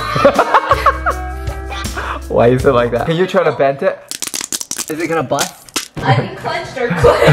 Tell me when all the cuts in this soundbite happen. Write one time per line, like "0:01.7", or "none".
0:03.1
0:06.0